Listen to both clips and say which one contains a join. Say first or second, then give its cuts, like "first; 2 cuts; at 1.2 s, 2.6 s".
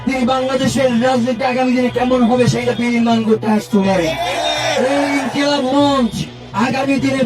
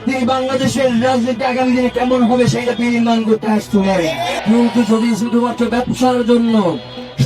second; 1 cut; at 4.4 s